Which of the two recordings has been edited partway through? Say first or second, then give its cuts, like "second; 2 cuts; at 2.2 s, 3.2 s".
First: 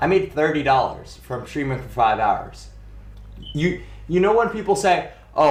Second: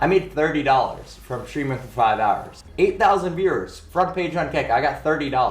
second; 1 cut; at 2.6 s